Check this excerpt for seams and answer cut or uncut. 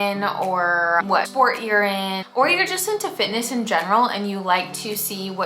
cut